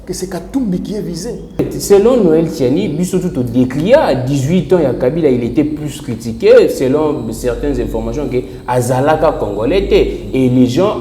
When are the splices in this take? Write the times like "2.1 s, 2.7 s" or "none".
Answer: 1.6 s